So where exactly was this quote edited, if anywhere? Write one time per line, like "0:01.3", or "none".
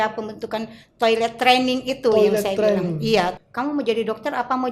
0:03.4